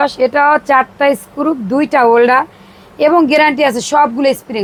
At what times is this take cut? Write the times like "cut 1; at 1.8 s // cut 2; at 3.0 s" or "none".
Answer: none